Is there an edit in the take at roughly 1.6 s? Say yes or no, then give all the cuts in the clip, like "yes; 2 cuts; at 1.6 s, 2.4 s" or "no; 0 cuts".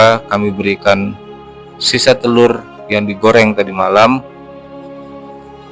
no; 0 cuts